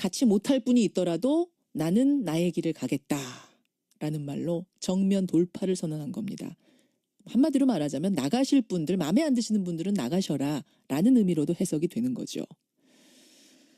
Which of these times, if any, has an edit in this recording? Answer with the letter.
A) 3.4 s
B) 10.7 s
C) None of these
A